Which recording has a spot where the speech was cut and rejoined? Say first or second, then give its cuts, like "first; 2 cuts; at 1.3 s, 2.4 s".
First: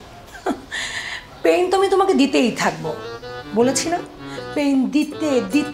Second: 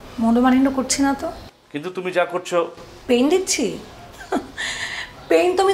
second; 1 cut; at 2.8 s